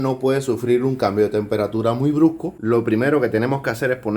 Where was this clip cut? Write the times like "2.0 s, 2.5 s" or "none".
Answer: 2.5 s

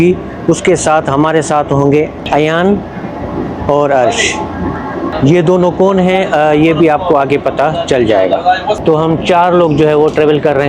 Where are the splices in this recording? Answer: none

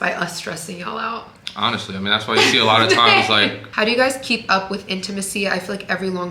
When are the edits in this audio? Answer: 3.6 s

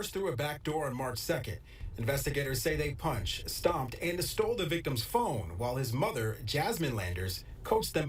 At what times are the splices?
none

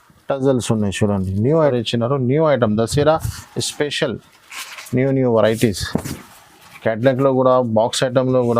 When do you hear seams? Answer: 1.7 s

